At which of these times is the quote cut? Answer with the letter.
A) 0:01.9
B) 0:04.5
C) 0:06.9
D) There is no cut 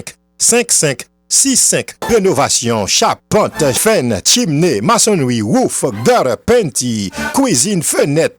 A